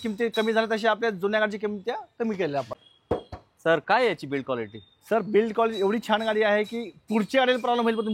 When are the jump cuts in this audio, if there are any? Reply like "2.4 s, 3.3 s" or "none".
2.8 s

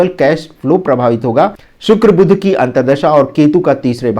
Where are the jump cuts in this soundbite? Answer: 1.7 s

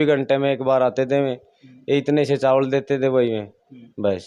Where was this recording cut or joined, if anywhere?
none

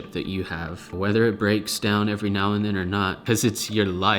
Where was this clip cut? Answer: 3.2 s

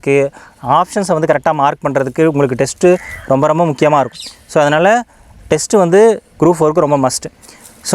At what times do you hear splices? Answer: none

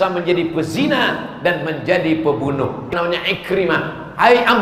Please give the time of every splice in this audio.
2.9 s

